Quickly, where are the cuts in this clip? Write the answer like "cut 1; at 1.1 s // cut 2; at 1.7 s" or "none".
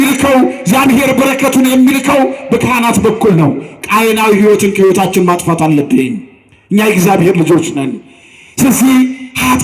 none